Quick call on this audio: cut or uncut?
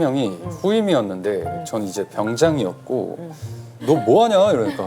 cut